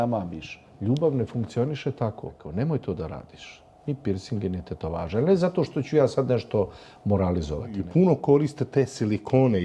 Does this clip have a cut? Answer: yes; 2 cuts; at 2.4 s, 7.8 s

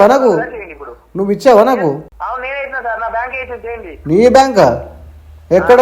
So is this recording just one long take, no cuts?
no; 1 cut; at 2.1 s

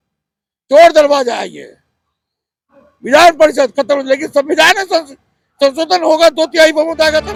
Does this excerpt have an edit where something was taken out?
no; 0 cuts

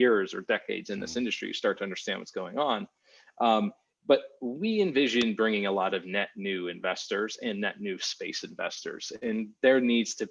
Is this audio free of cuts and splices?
yes; 0 cuts

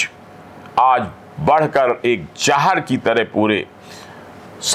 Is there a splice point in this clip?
no; 0 cuts

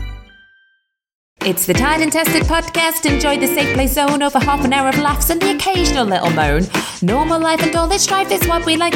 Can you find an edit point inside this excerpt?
yes; 1 cut; at 1.2 s

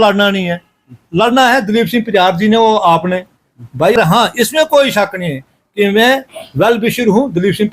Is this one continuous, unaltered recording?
no; 1 cut; at 4.0 s

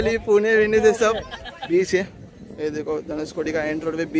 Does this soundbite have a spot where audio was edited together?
yes; 1 cut; at 1.5 s

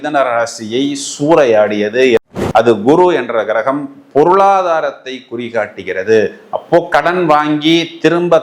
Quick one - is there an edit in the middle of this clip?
yes; 1 cut; at 2.2 s

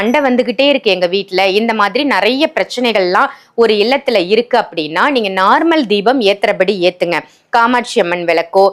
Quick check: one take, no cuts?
yes; 0 cuts

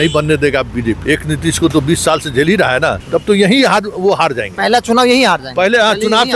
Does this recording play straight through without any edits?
no; 2 cuts; at 1.0 s, 3.0 s

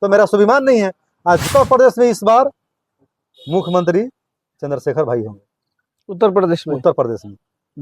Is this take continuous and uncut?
no; 1 cut; at 1.5 s

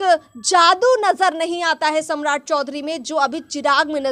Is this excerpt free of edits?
yes; 0 cuts

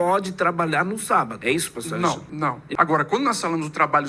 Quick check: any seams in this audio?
yes; 2 cuts; at 1.3 s, 2.6 s

